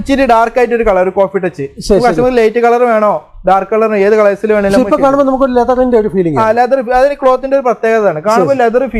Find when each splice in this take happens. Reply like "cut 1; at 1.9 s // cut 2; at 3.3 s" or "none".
none